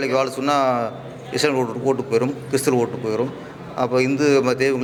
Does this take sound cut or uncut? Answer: uncut